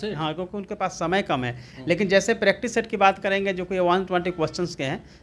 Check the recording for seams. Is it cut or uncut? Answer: uncut